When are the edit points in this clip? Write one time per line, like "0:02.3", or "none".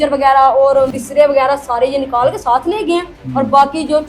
0:00.9